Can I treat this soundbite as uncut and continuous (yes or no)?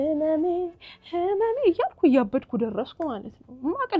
yes